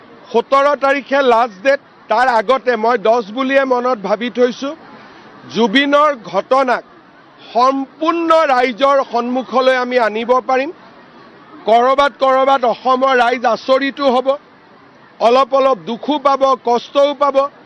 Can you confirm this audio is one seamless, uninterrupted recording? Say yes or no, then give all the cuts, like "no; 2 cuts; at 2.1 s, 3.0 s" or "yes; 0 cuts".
yes; 0 cuts